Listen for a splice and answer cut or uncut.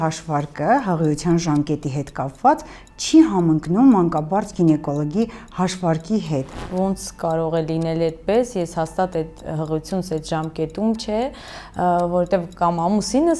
cut